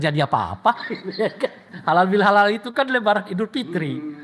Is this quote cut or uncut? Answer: cut